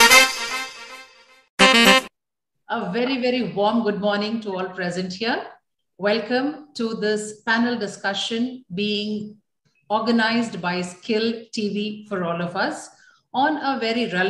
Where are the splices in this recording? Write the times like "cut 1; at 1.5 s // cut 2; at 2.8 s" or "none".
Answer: cut 1; at 2.0 s